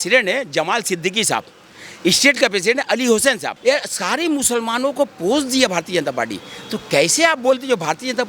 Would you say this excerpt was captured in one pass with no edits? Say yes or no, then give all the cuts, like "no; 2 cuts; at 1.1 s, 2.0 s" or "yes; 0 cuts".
no; 1 cut; at 3.5 s